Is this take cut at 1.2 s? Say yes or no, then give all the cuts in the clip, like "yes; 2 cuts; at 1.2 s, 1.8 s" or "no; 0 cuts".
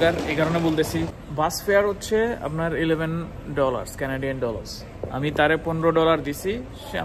yes; 1 cut; at 1.2 s